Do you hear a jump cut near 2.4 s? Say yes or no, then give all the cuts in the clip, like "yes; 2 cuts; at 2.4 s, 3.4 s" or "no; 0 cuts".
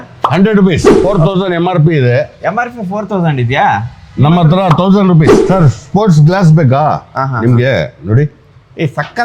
no; 2 cuts; at 0.9 s, 5.4 s